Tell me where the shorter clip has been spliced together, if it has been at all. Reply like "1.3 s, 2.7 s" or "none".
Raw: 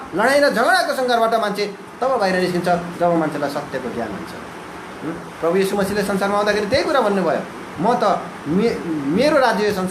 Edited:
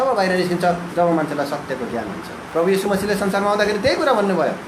2.4 s